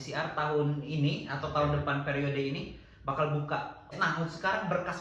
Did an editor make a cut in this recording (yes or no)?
yes